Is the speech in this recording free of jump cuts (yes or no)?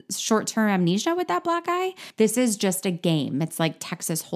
no